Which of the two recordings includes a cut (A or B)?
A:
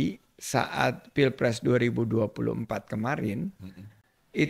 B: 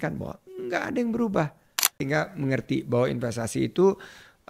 B